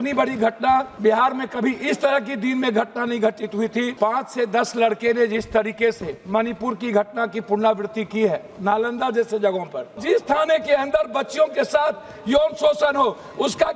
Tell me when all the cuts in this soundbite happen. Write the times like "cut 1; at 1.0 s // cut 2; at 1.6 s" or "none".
cut 1; at 0.9 s // cut 2; at 3.9 s // cut 3; at 10.0 s